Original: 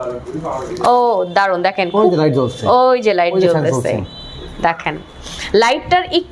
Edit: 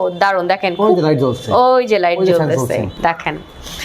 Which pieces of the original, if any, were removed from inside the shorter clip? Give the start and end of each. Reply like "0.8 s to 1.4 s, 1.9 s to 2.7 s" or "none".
4.1 s to 4.5 s